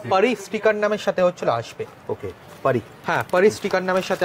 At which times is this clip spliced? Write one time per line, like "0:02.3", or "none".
none